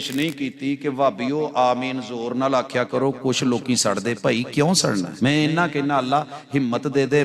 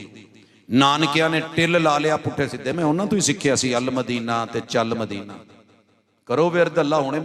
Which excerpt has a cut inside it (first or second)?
first